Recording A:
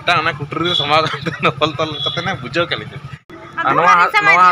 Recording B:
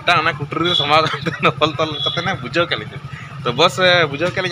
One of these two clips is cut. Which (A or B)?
A